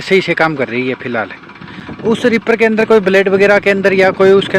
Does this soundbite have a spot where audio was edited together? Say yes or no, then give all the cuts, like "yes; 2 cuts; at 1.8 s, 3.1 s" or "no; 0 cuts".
no; 0 cuts